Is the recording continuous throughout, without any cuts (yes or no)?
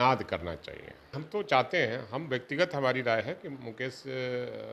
no